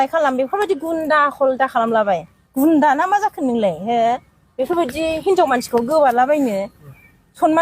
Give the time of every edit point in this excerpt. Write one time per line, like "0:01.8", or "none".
none